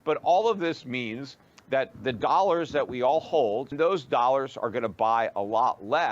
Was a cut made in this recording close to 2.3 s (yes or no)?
no